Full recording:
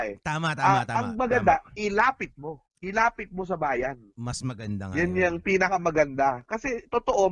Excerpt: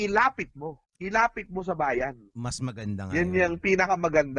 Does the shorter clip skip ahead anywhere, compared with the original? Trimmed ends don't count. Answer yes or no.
no